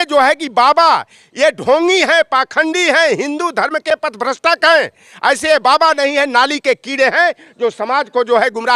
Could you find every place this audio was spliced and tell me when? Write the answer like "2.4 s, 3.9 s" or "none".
none